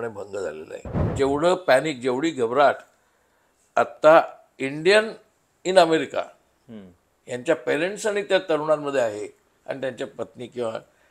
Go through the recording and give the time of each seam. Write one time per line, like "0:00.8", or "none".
0:01.0